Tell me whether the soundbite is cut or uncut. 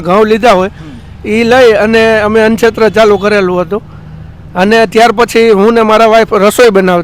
uncut